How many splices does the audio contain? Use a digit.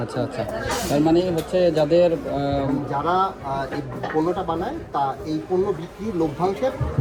0